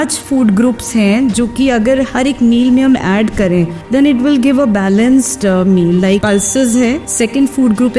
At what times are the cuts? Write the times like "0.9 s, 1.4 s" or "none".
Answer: 3.8 s, 6.2 s, 7.1 s